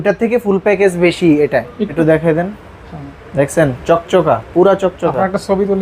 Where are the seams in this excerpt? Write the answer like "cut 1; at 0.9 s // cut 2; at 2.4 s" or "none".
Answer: cut 1; at 1.9 s

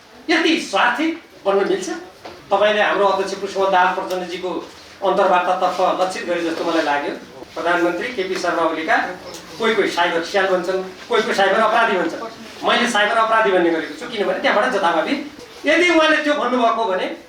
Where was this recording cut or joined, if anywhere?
cut 1; at 2.3 s // cut 2; at 7.3 s // cut 3; at 15.3 s

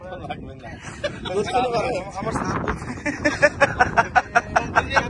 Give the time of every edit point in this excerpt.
none

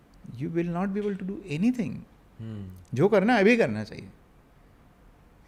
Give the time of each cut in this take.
none

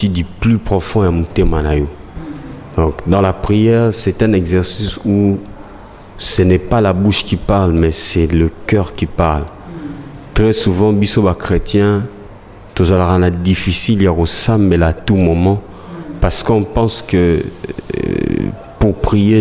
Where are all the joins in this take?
none

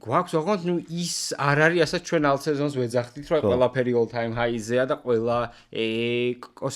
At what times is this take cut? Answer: none

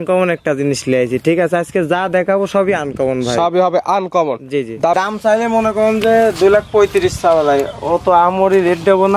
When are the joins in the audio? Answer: cut 1; at 4.9 s

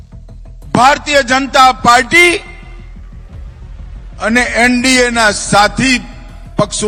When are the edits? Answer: none

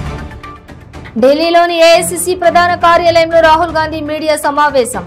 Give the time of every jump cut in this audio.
none

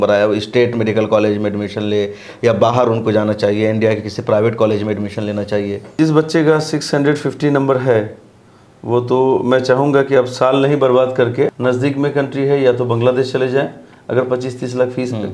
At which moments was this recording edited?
cut 1; at 5.9 s // cut 2; at 11.6 s

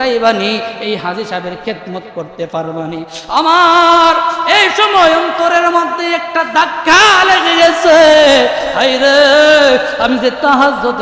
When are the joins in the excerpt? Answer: none

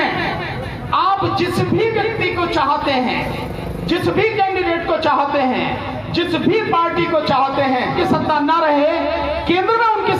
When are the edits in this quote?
cut 1; at 8.0 s

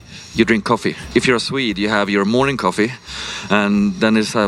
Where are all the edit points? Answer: cut 1; at 1.0 s

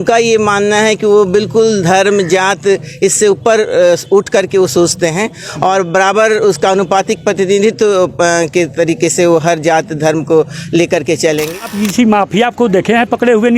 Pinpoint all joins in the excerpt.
cut 1; at 11.6 s

